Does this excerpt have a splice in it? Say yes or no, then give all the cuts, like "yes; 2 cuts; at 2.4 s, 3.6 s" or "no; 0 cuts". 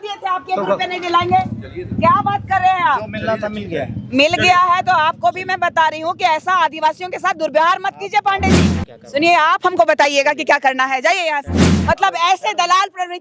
yes; 2 cuts; at 8.8 s, 11.7 s